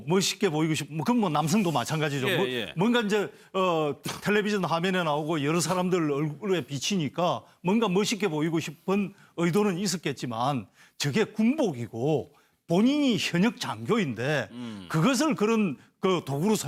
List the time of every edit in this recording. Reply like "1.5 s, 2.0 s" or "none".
none